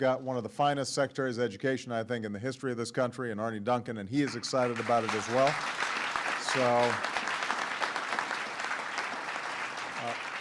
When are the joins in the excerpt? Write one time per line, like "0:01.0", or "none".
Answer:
0:07.0